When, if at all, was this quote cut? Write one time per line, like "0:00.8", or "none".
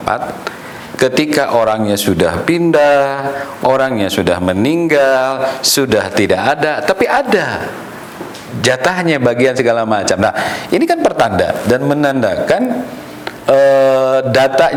none